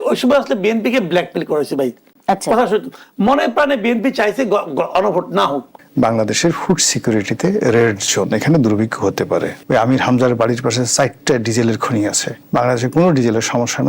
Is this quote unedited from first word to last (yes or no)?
no